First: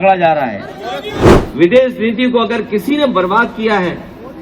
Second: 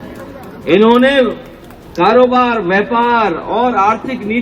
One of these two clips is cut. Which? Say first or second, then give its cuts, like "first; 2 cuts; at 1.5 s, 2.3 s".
first; 1 cut; at 1.1 s